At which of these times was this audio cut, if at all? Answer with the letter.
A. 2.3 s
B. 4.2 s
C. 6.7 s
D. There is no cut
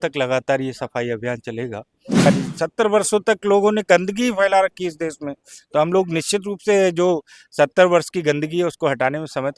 A